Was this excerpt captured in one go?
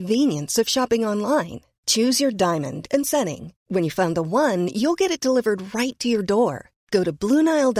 yes; 0 cuts

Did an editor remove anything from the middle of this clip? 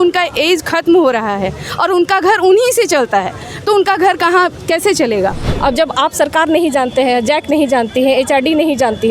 yes; 1 cut; at 5.5 s

